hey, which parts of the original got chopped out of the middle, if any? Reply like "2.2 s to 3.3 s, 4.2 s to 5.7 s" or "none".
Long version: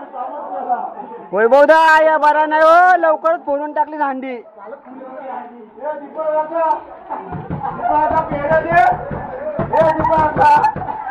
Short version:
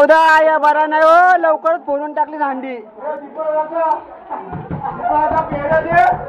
4.5 s to 5.7 s